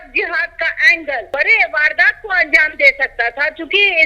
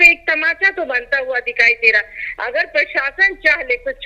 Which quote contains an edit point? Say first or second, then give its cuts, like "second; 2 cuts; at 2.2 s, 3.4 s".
first; 1 cut; at 1.3 s